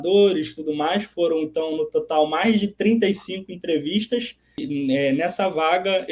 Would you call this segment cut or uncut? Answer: cut